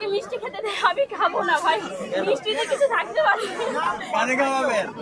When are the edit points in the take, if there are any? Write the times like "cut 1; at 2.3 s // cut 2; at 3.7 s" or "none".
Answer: none